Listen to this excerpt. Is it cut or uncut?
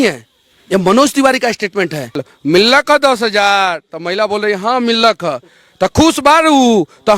cut